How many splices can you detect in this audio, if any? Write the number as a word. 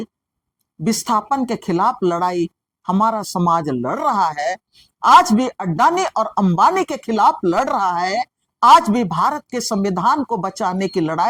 zero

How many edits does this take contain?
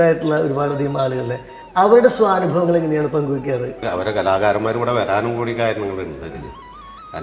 two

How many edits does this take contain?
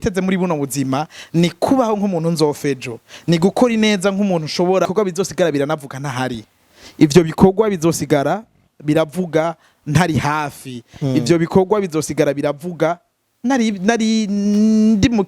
one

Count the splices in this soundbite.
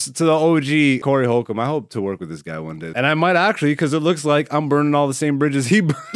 two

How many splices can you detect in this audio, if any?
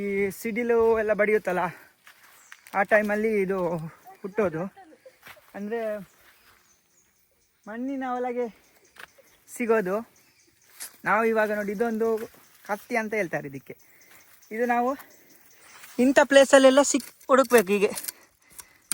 zero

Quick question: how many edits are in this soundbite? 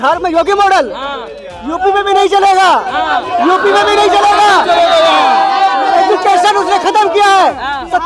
zero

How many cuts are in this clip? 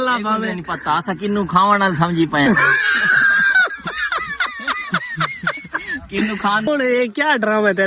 one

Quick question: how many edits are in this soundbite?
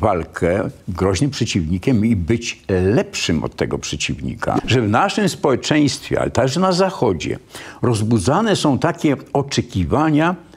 one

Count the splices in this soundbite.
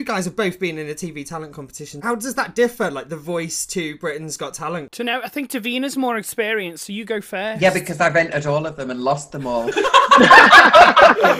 two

